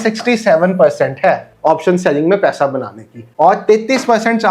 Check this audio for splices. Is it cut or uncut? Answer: uncut